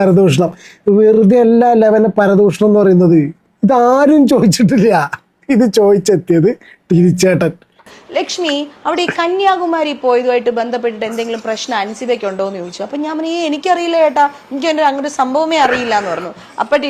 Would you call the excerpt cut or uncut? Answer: cut